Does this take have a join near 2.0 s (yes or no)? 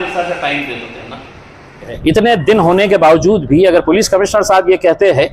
yes